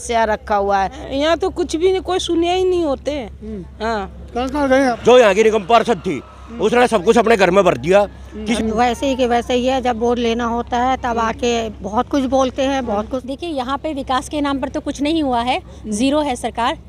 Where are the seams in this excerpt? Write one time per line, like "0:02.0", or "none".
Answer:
0:01.0
0:05.0
0:08.6
0:13.2